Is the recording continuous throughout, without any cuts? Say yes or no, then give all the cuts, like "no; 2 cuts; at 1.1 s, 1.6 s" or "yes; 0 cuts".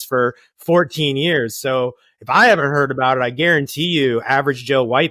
yes; 0 cuts